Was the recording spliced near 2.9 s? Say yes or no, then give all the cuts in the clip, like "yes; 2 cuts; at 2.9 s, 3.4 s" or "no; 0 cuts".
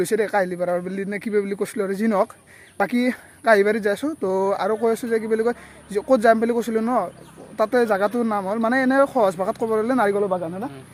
no; 0 cuts